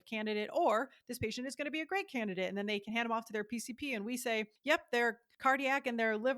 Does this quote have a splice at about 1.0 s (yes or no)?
no